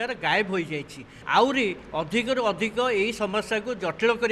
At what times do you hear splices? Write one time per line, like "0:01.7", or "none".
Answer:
0:01.1